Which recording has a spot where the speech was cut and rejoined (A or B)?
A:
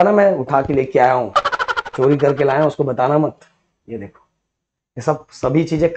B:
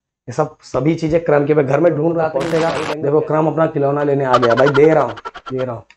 B